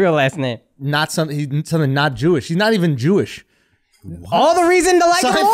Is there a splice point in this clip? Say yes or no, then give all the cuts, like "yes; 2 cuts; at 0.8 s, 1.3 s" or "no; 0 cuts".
no; 0 cuts